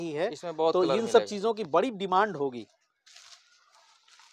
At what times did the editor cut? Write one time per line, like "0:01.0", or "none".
none